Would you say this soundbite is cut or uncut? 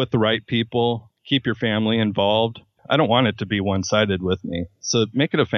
cut